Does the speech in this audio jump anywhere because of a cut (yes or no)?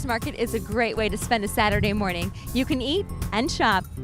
no